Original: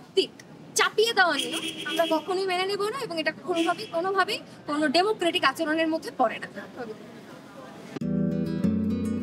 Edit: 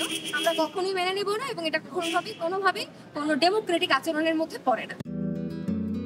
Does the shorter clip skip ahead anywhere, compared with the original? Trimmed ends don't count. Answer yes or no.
yes